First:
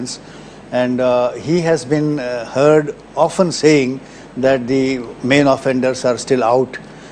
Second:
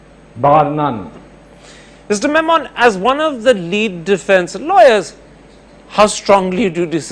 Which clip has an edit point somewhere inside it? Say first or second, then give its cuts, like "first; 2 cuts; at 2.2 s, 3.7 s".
first; 1 cut; at 5.7 s